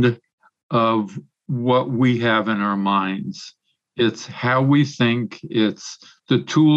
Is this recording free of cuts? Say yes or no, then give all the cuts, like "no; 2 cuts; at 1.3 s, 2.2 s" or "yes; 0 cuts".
yes; 0 cuts